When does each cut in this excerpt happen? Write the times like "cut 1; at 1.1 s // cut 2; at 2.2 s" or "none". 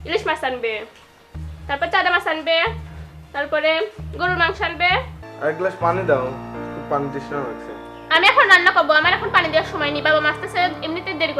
cut 1; at 5.2 s